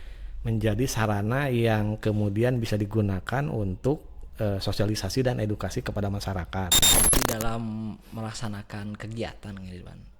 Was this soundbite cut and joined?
yes; 1 cut; at 6.9 s

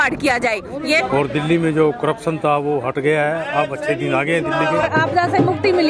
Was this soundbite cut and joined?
yes; 2 cuts; at 1.0 s, 4.9 s

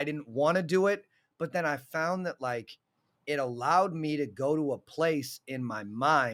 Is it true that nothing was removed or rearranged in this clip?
yes; 0 cuts

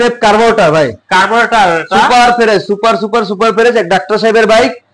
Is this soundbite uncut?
yes; 0 cuts

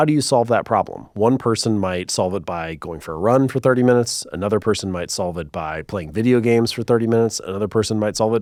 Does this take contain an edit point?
no; 0 cuts

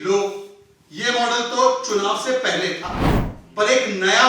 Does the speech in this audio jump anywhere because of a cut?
yes; 1 cut; at 3.0 s

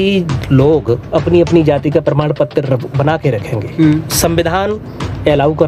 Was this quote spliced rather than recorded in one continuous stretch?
no; 0 cuts

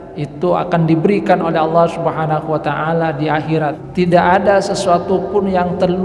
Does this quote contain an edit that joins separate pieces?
yes; 1 cut; at 3.8 s

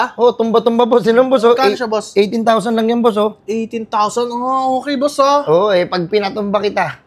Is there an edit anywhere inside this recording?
no; 0 cuts

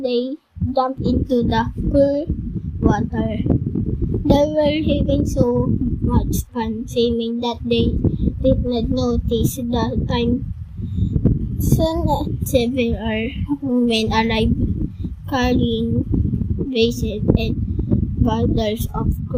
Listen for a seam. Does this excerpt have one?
no; 0 cuts

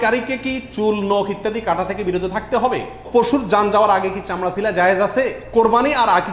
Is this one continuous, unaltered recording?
no; 2 cuts; at 3.0 s, 5.4 s

